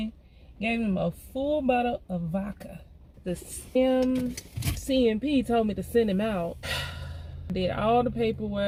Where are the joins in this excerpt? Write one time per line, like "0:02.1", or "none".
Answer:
none